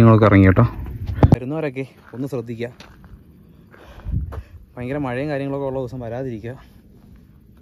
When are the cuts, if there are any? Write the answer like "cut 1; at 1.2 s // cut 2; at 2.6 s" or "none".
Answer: cut 1; at 1.4 s

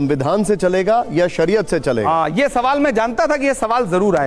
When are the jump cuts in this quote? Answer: none

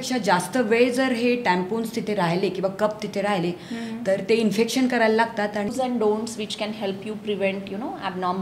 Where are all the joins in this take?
cut 1; at 5.7 s

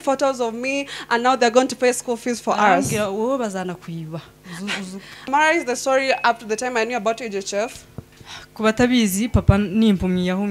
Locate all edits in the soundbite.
cut 1; at 5.3 s

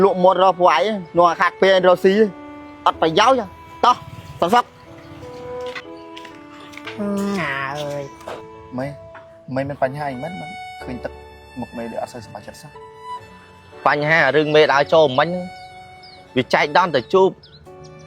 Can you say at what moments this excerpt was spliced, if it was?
cut 1; at 8.4 s

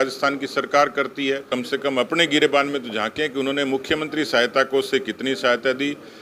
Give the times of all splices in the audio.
cut 1; at 1.5 s

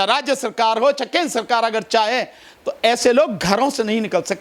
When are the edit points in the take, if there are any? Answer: none

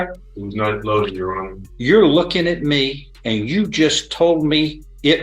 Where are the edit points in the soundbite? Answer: cut 1; at 1.6 s // cut 2; at 3.1 s

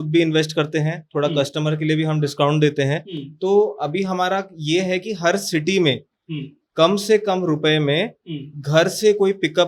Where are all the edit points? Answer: none

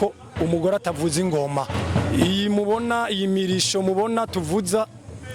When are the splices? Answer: cut 1; at 1.8 s

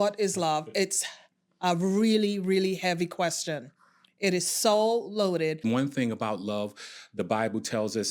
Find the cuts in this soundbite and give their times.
cut 1; at 5.6 s

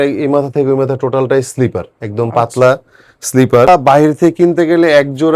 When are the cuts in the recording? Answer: cut 1; at 4.2 s

